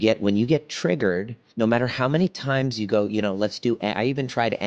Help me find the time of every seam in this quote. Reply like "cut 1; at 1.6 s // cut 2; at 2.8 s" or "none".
cut 1; at 1.4 s